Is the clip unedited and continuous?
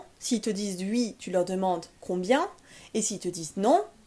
yes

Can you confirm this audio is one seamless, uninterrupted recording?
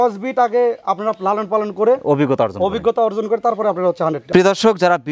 yes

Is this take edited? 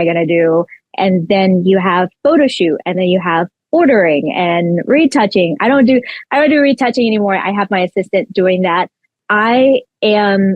yes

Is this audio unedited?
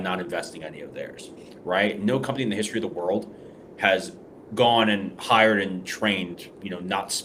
yes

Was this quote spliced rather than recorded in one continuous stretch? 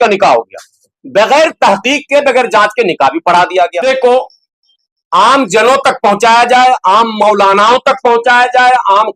yes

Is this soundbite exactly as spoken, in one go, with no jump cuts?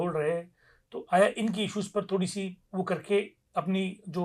yes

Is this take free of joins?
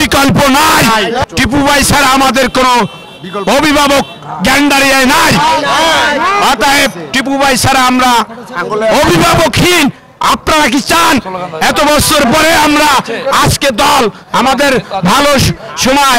no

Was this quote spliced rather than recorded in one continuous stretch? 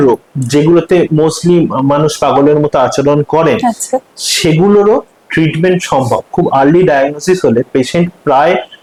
no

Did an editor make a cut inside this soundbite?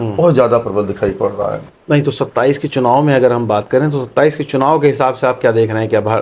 no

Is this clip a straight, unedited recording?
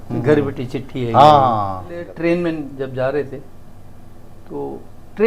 no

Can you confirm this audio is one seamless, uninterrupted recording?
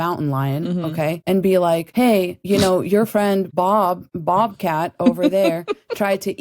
no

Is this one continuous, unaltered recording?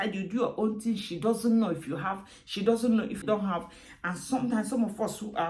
no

